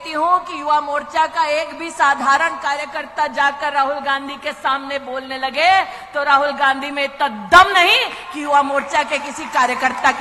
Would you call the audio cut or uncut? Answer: uncut